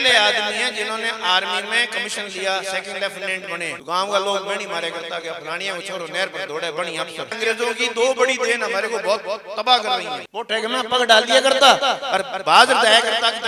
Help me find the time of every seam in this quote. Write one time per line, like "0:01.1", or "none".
0:03.8
0:07.3
0:10.2